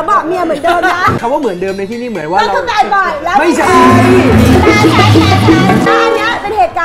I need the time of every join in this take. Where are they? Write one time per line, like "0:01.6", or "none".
0:01.2
0:05.9